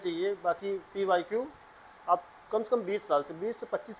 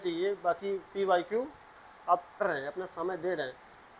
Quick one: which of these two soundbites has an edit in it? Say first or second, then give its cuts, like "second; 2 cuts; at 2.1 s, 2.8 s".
second; 1 cut; at 2.4 s